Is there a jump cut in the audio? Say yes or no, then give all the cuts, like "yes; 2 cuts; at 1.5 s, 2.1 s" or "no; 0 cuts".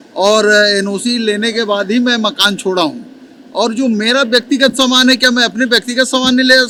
no; 0 cuts